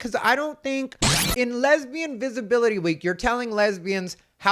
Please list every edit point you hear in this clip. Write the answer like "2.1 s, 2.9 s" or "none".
1.0 s